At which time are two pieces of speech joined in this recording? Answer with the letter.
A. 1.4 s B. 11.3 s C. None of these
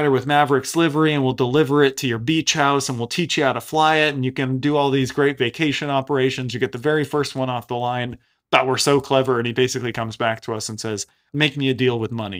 B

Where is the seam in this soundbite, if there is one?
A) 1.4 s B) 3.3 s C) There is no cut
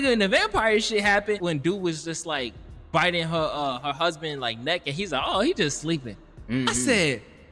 A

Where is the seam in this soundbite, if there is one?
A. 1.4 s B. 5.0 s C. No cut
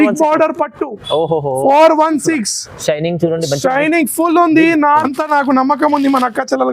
B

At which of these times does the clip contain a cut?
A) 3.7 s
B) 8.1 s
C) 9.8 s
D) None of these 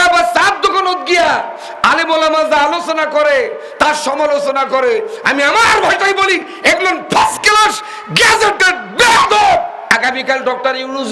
C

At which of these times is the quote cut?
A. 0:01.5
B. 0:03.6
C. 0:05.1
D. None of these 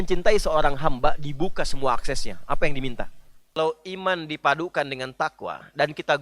B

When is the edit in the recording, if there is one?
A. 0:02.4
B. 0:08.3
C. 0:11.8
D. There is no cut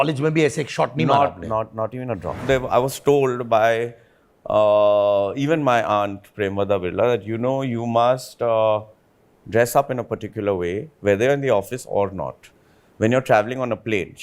A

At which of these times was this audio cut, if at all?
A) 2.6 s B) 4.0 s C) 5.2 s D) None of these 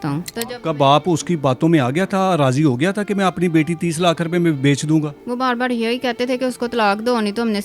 C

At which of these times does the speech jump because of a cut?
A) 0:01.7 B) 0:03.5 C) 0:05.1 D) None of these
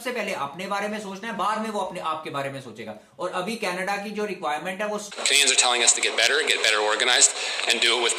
C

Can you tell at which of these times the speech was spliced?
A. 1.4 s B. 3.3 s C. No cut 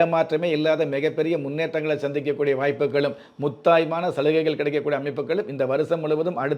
C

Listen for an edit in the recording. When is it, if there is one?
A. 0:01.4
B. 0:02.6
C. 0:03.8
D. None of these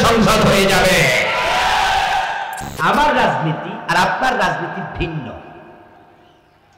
B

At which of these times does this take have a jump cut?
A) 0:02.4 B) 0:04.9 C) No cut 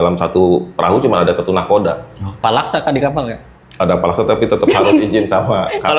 A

